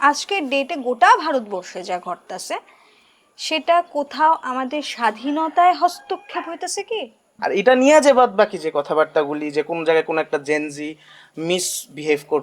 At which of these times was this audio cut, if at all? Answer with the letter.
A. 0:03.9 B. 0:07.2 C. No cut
B